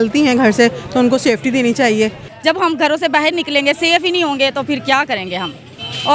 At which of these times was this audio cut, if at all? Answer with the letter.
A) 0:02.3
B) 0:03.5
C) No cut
A